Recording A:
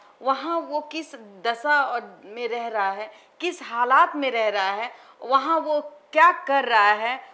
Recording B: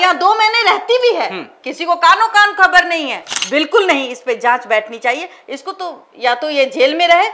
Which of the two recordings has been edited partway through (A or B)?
B